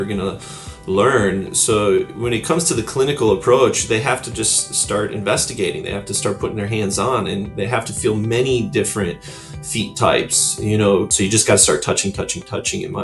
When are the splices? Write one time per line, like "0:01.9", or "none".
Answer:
0:11.1